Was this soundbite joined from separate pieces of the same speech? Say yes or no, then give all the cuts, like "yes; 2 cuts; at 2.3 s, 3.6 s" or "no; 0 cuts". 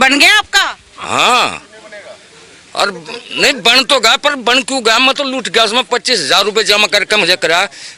no; 0 cuts